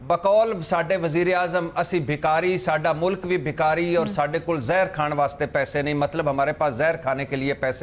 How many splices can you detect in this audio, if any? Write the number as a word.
zero